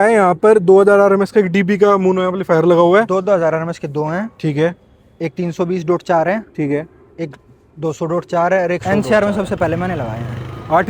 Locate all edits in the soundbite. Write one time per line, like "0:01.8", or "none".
0:08.8